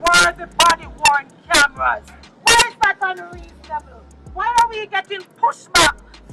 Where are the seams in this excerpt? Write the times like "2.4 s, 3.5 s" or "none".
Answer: none